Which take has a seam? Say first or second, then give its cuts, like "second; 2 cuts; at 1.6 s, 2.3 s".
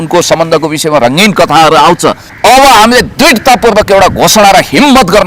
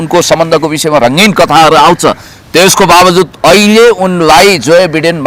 first; 1 cut; at 2.3 s